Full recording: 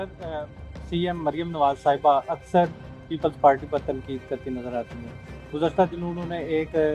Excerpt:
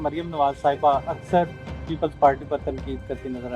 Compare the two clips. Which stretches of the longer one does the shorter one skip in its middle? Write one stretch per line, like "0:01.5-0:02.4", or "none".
none